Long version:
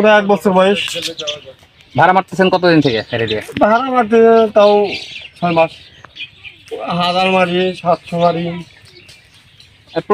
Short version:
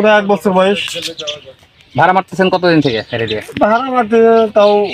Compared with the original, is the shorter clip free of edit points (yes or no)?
yes